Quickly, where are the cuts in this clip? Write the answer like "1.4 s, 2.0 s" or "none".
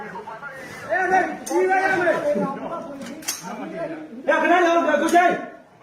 1.0 s